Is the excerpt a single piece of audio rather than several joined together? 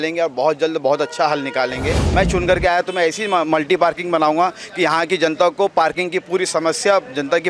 no; 1 cut; at 2.1 s

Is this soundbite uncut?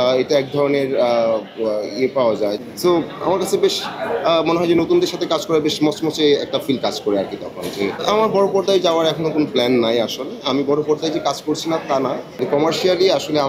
no; 3 cuts; at 2.5 s, 8.0 s, 12.3 s

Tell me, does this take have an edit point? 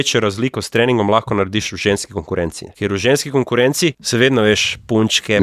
yes; 2 cuts; at 2.6 s, 4.0 s

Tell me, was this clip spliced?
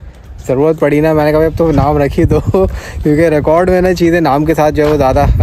no; 0 cuts

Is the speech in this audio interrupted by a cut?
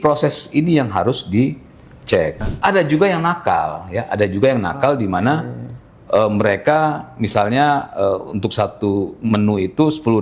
yes; 1 cut; at 2.4 s

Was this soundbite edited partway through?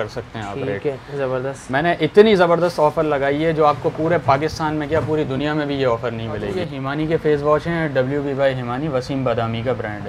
yes; 1 cut; at 6.6 s

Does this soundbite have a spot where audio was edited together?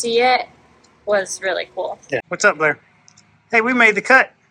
yes; 1 cut; at 2.3 s

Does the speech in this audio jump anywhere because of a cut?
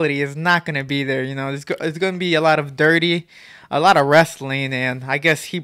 no; 0 cuts

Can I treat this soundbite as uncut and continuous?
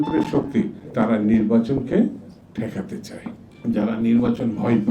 no; 1 cut; at 3.4 s

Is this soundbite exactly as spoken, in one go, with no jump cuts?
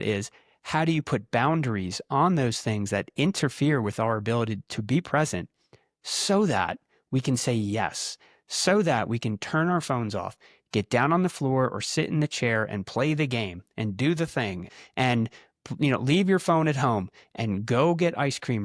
no; 1 cut; at 14.7 s

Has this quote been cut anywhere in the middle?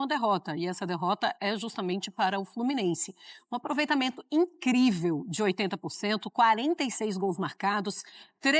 no; 0 cuts

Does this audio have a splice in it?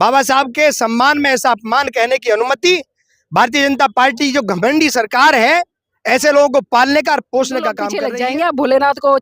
yes; 1 cut; at 7.9 s

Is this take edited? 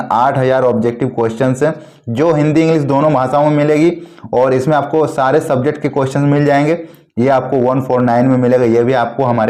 no; 0 cuts

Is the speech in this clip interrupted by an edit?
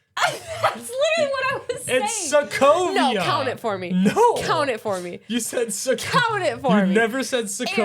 no; 0 cuts

